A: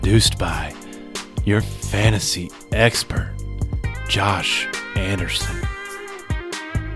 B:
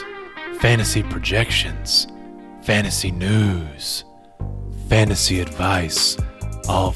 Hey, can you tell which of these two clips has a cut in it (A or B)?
A